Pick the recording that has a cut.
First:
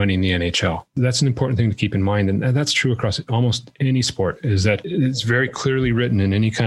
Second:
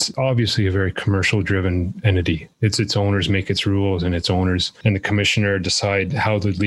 first; 1 cut; at 0.9 s

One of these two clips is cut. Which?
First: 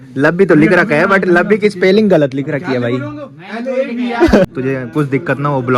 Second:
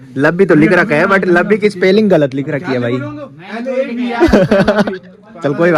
first; 1 cut; at 4.5 s

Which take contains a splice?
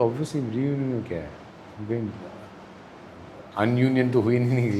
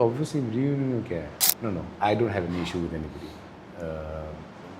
second; 1 cut; at 1.4 s

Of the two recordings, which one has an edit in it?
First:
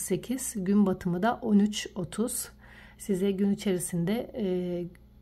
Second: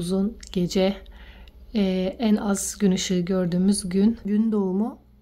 second; 1 cut; at 4.3 s

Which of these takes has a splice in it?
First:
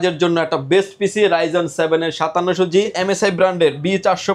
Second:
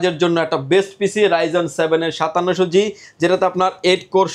first; 1 cut; at 3.0 s

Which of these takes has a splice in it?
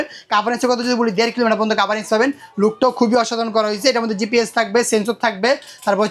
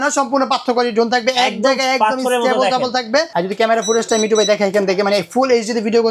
second; 1 cut; at 3.3 s

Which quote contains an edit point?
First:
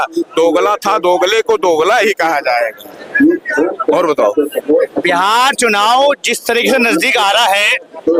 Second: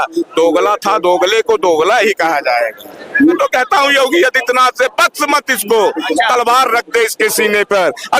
second; 1 cut; at 3.4 s

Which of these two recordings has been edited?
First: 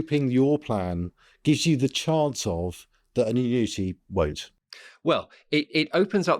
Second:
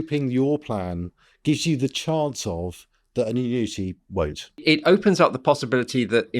second; 1 cut; at 4.6 s

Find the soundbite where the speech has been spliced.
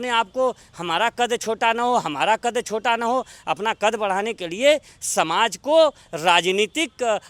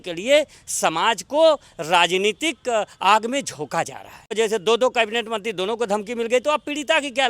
second; 1 cut; at 4.3 s

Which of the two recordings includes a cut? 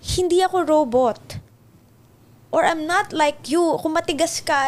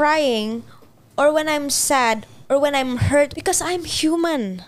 second; 1 cut; at 3.3 s

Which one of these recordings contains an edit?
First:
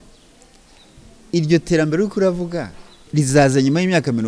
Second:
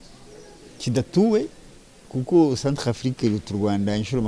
first; 1 cut; at 3.1 s

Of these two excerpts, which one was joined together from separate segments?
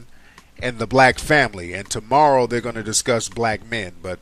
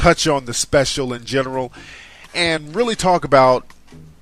first; 1 cut; at 2.7 s

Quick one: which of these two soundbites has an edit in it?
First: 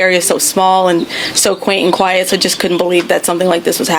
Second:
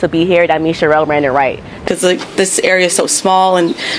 second; 1 cut; at 1.6 s

